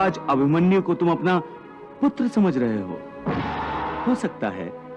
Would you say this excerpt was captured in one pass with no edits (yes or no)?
no